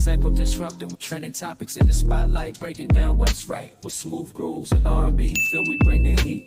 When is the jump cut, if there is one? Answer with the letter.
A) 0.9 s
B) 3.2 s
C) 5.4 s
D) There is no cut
A